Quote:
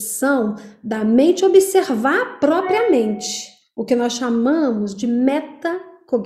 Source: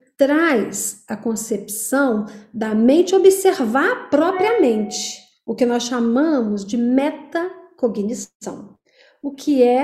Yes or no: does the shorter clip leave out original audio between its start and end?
no